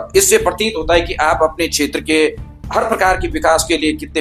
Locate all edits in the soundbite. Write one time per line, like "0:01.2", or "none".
none